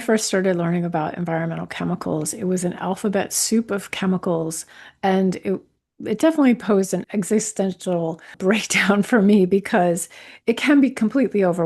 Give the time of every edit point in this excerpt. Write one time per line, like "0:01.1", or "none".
0:07.0